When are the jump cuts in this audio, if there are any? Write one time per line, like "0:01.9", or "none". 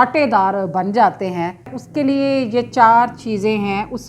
0:01.8